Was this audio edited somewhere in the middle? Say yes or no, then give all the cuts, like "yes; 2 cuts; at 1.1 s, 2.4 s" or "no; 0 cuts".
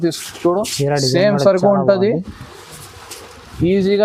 no; 0 cuts